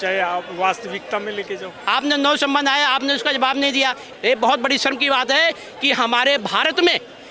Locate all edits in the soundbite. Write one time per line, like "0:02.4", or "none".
0:01.7
0:04.1